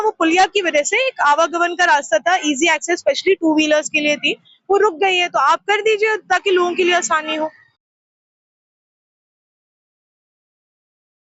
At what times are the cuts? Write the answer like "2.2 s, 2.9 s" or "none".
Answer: none